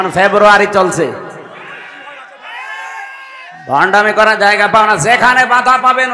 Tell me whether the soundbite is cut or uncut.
uncut